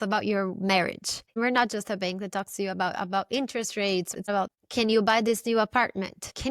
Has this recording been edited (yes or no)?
yes